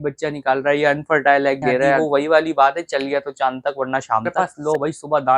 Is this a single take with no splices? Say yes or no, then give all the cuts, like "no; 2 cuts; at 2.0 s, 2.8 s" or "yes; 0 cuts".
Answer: no; 2 cuts; at 2.0 s, 4.3 s